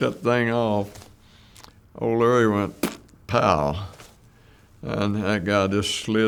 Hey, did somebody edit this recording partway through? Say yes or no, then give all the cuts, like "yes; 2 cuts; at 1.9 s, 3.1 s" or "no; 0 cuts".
no; 0 cuts